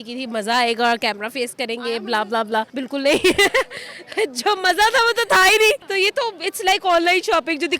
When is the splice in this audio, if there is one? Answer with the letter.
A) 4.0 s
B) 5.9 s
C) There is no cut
B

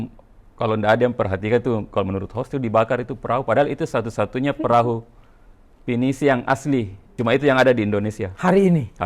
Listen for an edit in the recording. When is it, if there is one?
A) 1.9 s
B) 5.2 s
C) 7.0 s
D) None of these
C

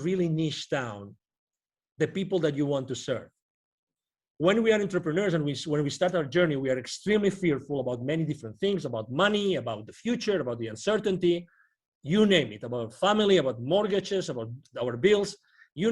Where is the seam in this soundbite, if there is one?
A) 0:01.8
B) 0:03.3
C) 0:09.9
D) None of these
D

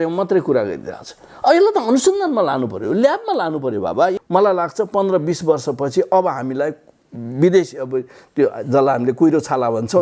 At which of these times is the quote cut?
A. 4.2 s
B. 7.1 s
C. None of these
A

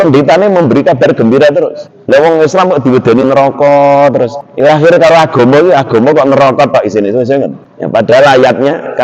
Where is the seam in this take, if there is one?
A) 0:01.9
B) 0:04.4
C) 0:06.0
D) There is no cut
A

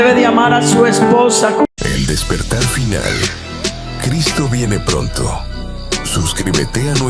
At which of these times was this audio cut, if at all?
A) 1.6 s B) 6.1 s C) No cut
A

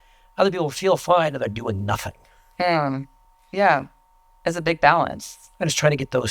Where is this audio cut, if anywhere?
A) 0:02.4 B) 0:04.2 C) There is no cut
C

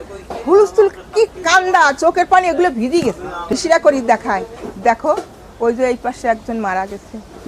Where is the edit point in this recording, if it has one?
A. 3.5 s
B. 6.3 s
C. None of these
A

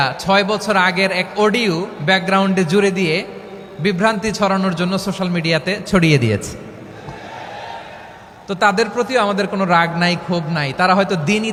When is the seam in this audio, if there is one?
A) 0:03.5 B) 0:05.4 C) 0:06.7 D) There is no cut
D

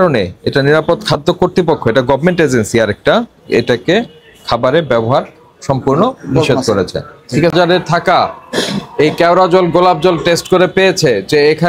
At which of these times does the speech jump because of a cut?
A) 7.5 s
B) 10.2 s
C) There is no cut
A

